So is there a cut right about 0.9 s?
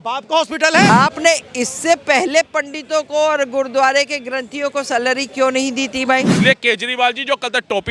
yes; 2 cuts; at 0.9 s, 6.4 s

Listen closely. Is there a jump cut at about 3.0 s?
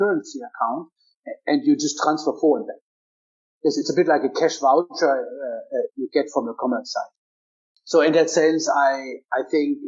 no; 0 cuts

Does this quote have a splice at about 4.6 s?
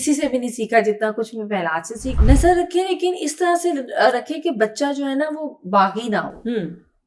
no; 1 cut; at 2.2 s

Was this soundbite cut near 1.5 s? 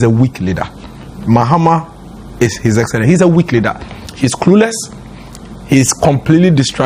no; 0 cuts

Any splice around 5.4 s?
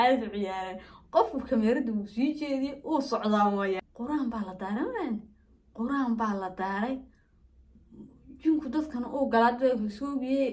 no; 1 cut; at 3.8 s

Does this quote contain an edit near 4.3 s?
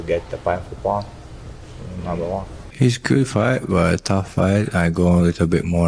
no; 1 cut; at 2.6 s

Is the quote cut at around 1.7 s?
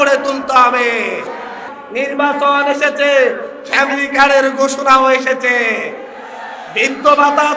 yes; 1 cut; at 1.7 s

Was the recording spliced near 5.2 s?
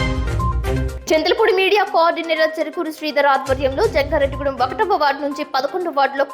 no; 1 cut; at 0.9 s

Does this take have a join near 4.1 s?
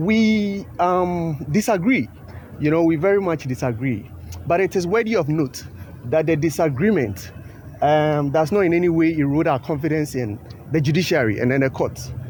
no; 0 cuts

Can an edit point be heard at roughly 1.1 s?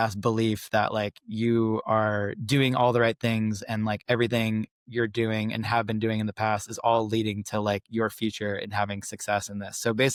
no; 0 cuts

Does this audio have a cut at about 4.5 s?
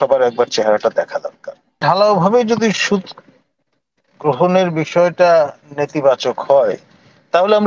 no; 1 cut; at 1.8 s

